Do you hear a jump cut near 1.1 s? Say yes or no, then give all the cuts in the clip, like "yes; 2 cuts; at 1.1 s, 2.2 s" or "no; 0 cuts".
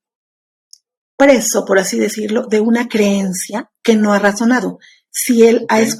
no; 0 cuts